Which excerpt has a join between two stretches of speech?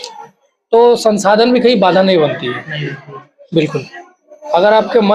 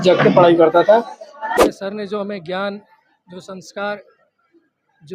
second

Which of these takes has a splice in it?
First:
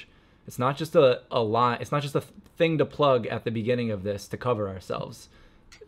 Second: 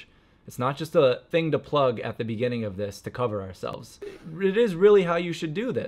second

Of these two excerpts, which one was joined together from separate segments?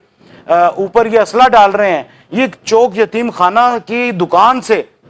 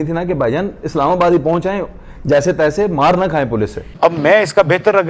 second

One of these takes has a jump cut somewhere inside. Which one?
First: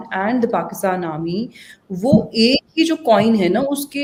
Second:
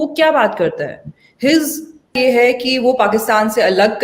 second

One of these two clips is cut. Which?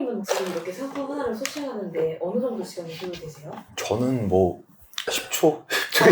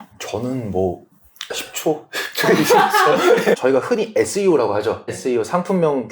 second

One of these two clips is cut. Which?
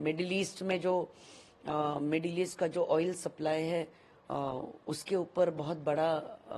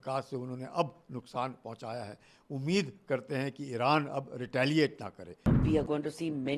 second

